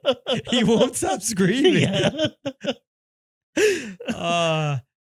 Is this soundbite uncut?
yes; 0 cuts

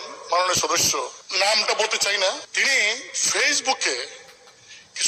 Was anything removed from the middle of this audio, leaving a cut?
yes; 2 cuts; at 1.2 s, 2.5 s

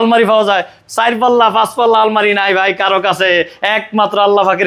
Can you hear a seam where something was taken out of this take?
no; 0 cuts

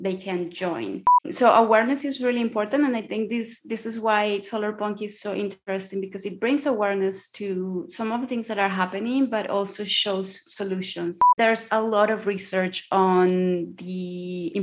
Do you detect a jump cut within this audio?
yes; 2 cuts; at 1.2 s, 11.2 s

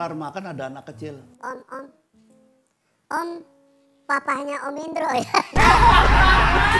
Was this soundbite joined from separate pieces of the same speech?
no; 0 cuts

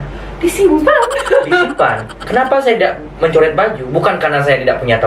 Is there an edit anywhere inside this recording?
yes; 1 cut; at 2.1 s

